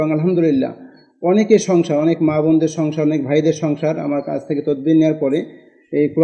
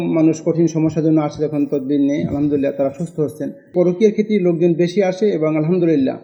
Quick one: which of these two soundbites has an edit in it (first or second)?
second